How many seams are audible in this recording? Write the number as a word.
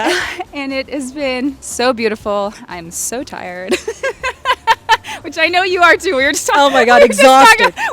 one